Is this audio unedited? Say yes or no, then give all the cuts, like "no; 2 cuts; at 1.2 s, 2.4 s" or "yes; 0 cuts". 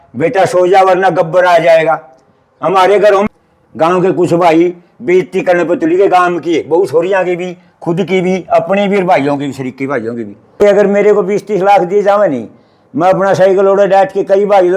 no; 2 cuts; at 3.3 s, 10.6 s